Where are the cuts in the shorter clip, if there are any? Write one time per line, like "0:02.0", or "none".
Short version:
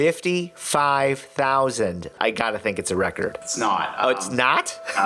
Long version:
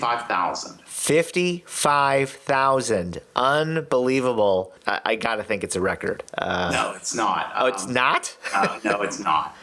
0:02.1
0:03.4